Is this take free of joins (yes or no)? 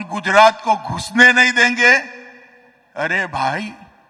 yes